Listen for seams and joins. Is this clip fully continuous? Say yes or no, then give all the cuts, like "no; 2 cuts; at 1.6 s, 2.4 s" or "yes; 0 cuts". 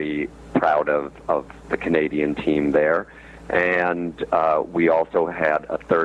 yes; 0 cuts